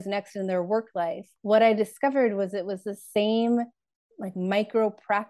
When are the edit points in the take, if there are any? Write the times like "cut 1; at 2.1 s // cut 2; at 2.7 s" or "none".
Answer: cut 1; at 1.3 s